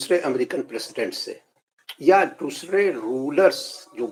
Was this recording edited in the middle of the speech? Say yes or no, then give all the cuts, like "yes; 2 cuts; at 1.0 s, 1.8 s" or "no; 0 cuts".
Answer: no; 0 cuts